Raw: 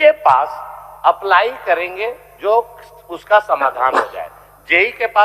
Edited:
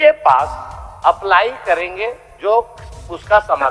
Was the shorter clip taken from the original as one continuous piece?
yes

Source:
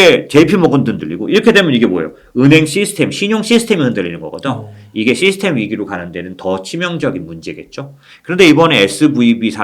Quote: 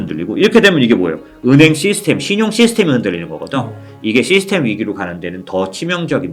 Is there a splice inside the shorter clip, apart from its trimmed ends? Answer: no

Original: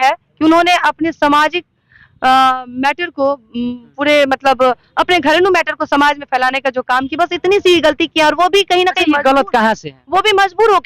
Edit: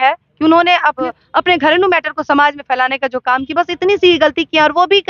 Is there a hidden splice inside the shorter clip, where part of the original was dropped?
yes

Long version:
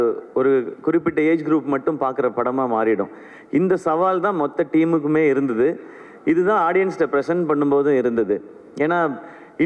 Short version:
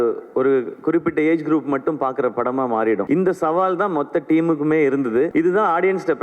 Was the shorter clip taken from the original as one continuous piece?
no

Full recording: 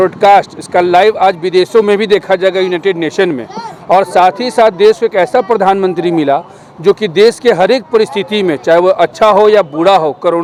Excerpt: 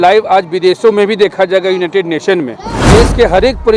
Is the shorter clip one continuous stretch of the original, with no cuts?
no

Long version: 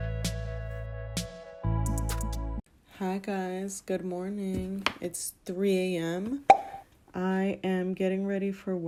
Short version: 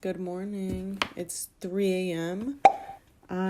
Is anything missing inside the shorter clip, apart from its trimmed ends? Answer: no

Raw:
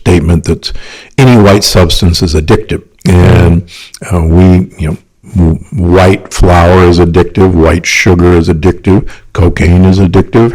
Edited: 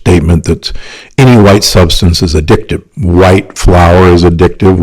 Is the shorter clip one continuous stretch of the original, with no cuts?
no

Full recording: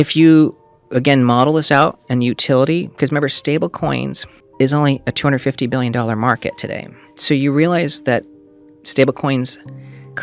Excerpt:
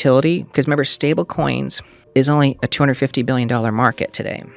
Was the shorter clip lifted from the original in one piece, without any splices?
yes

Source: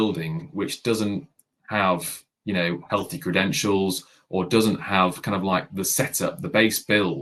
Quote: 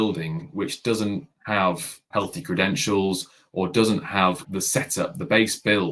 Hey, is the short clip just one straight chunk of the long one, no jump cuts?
no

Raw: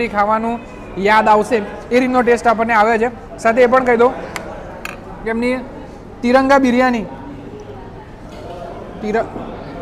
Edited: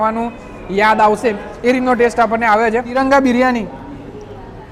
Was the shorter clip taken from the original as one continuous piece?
no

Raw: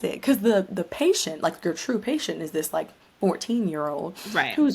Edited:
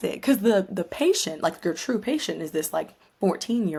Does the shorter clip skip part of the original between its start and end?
no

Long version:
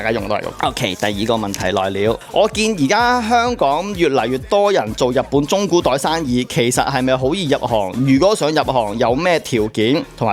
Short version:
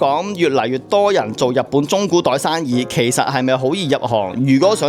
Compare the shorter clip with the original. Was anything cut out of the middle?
no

